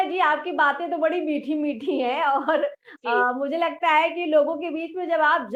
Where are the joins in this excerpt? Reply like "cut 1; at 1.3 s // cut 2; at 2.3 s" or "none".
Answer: none